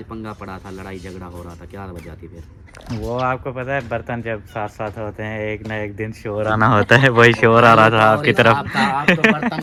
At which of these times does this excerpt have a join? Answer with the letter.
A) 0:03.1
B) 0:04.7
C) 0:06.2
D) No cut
D